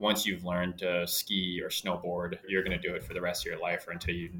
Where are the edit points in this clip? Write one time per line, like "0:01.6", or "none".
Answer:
none